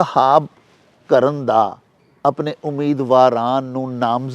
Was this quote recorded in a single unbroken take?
yes; 0 cuts

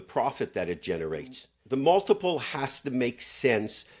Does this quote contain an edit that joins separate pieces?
yes; 1 cut; at 1.5 s

